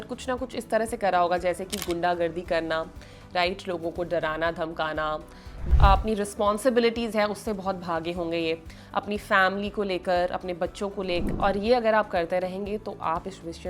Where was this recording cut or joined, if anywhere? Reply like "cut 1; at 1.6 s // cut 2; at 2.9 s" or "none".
cut 1; at 5.6 s // cut 2; at 11.2 s